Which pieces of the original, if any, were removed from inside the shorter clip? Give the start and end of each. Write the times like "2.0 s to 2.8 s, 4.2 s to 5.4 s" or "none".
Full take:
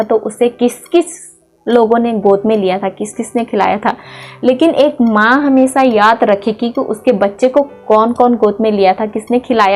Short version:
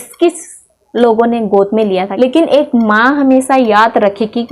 2.8 s to 4.4 s